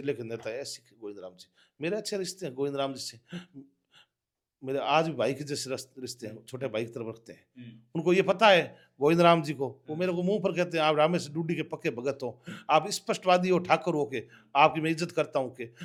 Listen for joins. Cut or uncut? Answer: uncut